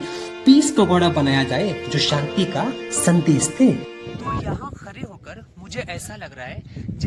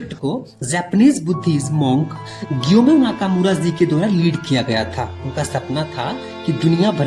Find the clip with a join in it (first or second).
first